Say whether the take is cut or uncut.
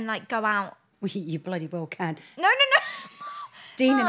cut